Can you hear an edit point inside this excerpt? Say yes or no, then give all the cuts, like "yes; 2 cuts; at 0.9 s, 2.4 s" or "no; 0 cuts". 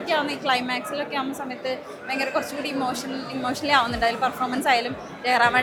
no; 0 cuts